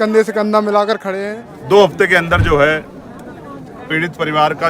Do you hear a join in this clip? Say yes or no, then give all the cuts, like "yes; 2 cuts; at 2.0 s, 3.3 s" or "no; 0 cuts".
yes; 1 cut; at 1.1 s